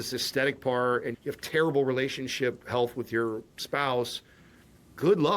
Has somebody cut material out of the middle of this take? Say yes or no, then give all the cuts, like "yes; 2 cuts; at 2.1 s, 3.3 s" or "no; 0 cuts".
yes; 1 cut; at 1.1 s